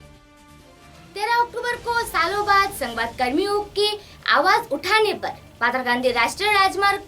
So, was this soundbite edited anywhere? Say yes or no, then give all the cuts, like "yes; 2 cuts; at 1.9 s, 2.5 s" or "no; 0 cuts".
yes; 1 cut; at 0.9 s